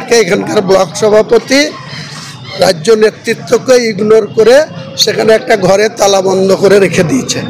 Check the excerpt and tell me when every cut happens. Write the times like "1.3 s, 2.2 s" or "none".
none